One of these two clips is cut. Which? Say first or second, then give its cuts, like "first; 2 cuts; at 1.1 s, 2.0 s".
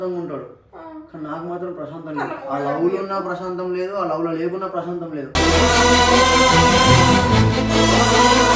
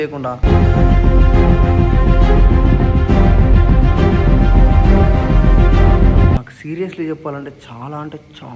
second; 1 cut; at 6.5 s